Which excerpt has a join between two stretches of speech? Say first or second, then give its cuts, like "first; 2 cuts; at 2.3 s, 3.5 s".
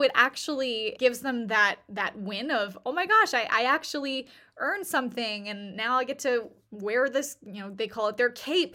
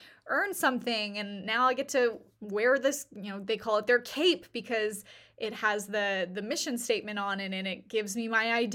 first; 1 cut; at 1.0 s